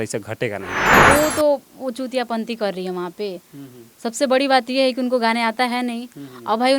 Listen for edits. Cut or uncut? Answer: cut